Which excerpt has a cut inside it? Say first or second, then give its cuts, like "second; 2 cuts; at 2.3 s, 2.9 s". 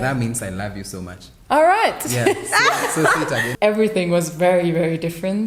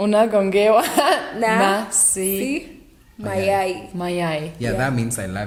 first; 1 cut; at 3.5 s